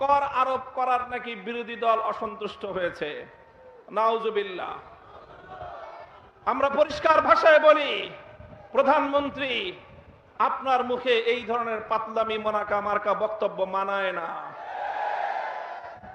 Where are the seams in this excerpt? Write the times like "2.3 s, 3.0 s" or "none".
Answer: none